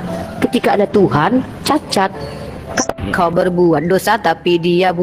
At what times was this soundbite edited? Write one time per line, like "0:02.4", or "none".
0:02.8